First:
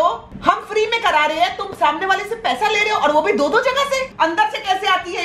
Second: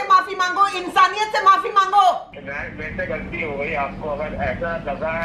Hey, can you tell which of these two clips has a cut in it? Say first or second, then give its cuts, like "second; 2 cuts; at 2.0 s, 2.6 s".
first; 1 cut; at 4.1 s